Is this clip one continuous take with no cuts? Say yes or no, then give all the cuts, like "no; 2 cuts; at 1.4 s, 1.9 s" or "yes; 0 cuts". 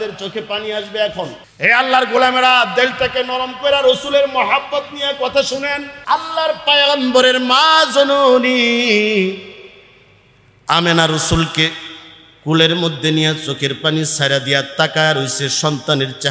no; 2 cuts; at 1.4 s, 5.9 s